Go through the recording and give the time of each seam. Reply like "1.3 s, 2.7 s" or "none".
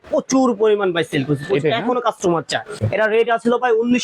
2.8 s